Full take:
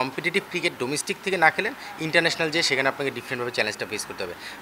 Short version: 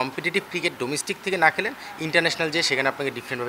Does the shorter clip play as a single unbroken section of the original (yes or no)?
yes